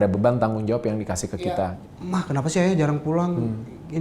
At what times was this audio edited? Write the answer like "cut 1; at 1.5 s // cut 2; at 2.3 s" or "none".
cut 1; at 1.4 s